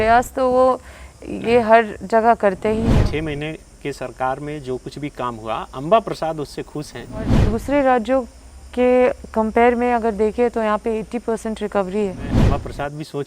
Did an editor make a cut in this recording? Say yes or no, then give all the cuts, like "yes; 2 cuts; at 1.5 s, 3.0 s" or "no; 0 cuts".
yes; 3 cuts; at 2.9 s, 7.4 s, 12.4 s